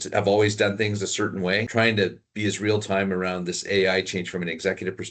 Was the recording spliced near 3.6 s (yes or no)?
no